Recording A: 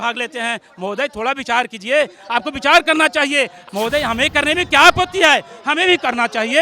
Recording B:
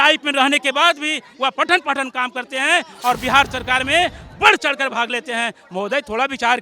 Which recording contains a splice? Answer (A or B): A